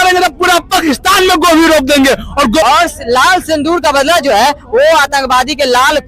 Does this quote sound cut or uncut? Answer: cut